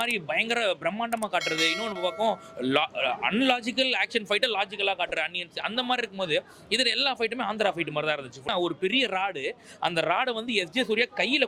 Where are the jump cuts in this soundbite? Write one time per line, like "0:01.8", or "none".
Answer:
0:08.5